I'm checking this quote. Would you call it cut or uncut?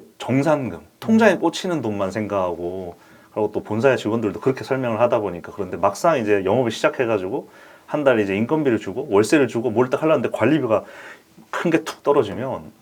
uncut